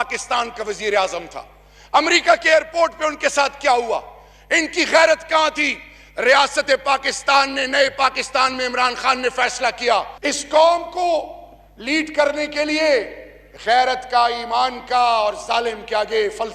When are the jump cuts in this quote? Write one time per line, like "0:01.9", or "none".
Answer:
0:10.1